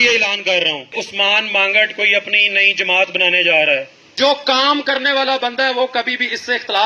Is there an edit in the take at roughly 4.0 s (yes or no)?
yes